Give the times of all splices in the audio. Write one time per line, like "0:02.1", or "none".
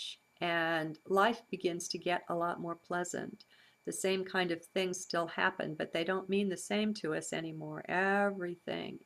none

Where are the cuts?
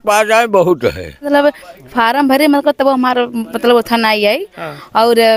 0:01.3

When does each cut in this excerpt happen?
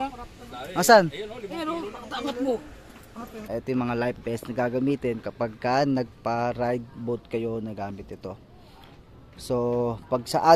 0:03.4

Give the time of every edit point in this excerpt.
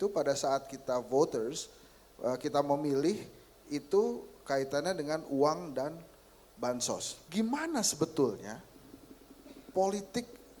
0:07.2

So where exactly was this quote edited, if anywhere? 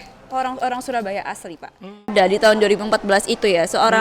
0:02.1

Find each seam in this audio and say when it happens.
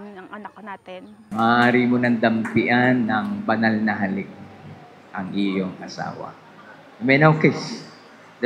0:01.3

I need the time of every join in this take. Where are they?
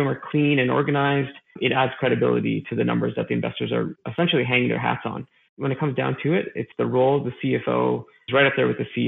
0:01.4
0:05.6

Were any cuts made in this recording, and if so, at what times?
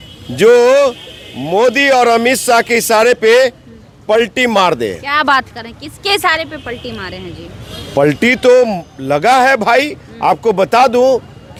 none

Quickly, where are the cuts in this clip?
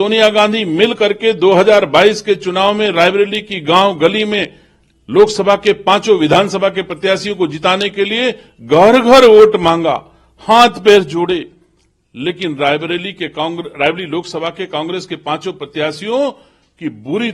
none

